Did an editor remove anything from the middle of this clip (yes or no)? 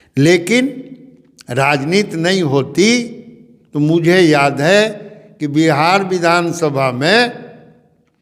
no